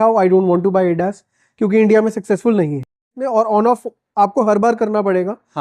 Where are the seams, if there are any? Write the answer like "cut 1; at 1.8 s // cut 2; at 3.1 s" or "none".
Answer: cut 1; at 3.2 s